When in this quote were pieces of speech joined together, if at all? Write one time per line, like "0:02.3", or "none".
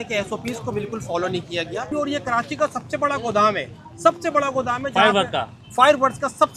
0:01.9